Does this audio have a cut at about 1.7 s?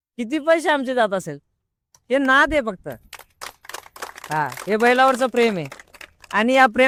no; 0 cuts

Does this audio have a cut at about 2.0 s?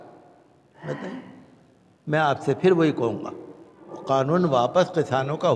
no; 1 cut; at 3.9 s

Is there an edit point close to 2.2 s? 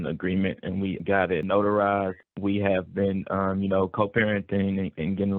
yes; 2 cuts; at 1.0 s, 2.2 s

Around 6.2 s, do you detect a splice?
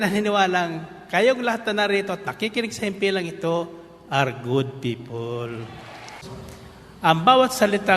yes; 1 cut; at 6.2 s

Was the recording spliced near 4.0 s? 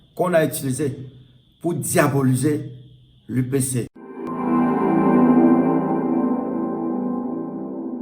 yes; 1 cut; at 4.0 s

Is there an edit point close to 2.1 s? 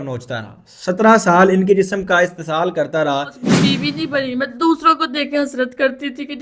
no; 1 cut; at 3.4 s

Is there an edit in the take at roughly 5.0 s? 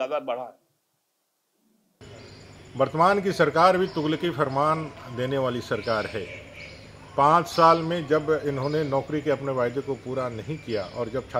no; 1 cut; at 2.0 s

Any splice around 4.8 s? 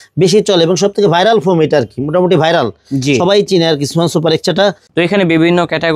yes; 1 cut; at 4.8 s

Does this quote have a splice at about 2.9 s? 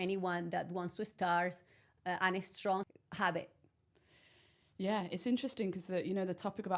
yes; 1 cut; at 2.9 s

